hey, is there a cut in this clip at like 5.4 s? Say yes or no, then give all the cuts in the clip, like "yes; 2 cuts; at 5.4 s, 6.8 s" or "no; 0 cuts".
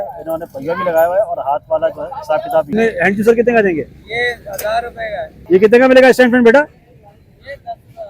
yes; 2 cuts; at 2.7 s, 5.4 s